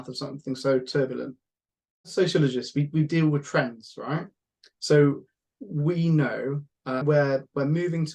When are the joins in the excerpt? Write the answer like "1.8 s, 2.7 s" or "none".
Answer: 2.1 s, 7.0 s